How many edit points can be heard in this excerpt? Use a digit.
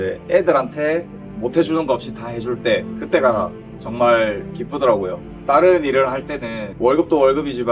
0